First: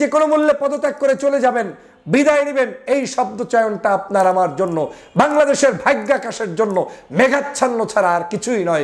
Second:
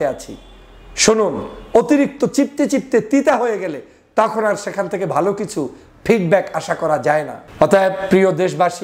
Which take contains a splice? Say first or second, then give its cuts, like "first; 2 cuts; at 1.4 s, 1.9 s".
second; 1 cut; at 7.4 s